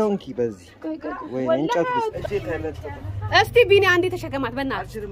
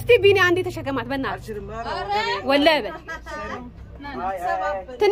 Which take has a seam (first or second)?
first